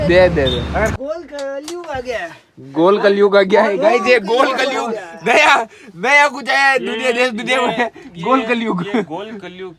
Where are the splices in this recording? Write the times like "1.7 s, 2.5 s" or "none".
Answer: 0.9 s

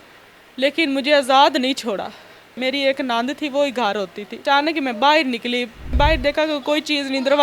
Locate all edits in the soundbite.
2.6 s, 4.4 s, 5.9 s

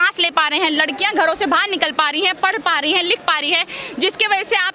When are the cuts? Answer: none

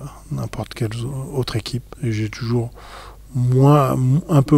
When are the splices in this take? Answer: 1.5 s

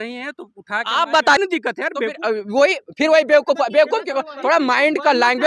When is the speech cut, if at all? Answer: 1.4 s

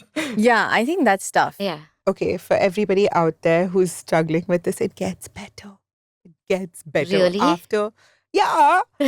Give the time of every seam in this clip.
1.9 s

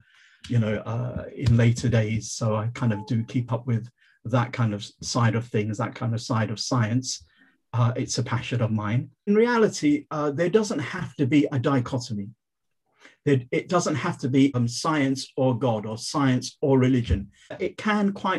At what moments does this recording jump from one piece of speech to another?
9.3 s, 14.6 s, 17.6 s

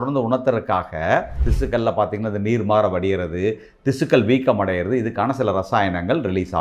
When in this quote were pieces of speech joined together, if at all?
1.4 s

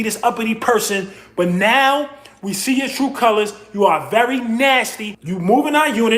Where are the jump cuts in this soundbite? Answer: 5.2 s

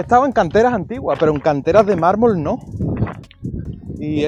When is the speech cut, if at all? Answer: none

